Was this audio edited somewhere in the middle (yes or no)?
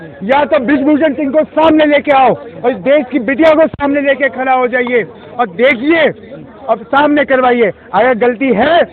no